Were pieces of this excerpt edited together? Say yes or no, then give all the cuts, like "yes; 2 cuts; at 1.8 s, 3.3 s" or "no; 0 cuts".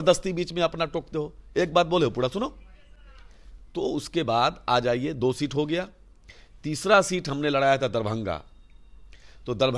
no; 0 cuts